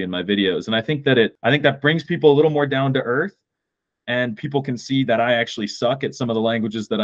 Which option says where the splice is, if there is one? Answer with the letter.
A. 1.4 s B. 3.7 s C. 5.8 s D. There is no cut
A